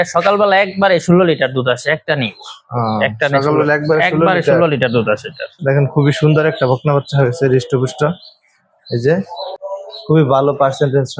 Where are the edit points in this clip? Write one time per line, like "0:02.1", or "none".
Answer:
0:05.6
0:09.5